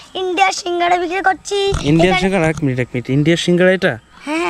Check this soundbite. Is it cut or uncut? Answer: uncut